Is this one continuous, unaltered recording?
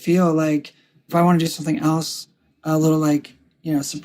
no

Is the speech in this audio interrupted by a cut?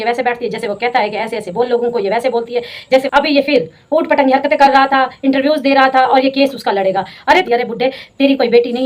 yes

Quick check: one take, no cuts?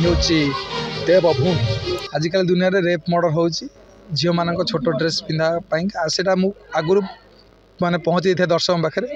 no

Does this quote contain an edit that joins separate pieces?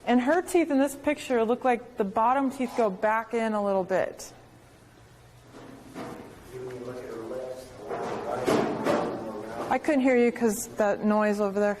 yes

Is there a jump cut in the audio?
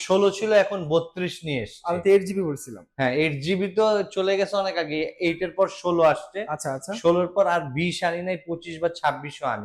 no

